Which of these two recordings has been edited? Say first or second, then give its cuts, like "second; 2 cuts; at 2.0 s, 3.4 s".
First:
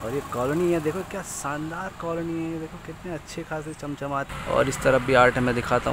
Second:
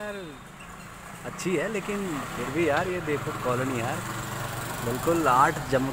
first; 1 cut; at 4.3 s